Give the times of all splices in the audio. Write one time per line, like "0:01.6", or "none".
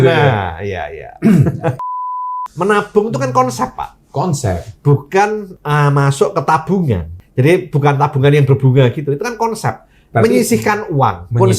0:02.2
0:05.5
0:07.2